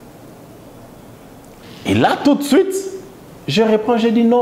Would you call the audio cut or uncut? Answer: cut